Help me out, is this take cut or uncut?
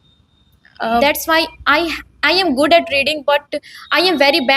cut